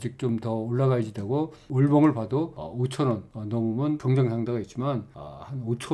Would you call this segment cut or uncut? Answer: cut